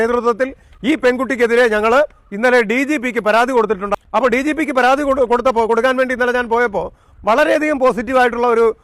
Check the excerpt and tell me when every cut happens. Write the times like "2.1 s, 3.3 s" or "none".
3.9 s